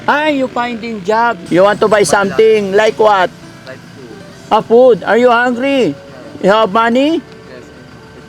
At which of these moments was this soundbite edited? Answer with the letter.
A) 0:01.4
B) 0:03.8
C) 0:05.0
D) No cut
A